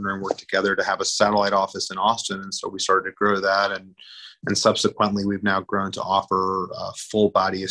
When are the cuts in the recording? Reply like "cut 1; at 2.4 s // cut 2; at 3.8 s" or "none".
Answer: none